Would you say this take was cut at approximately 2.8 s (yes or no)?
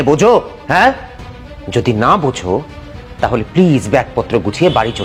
no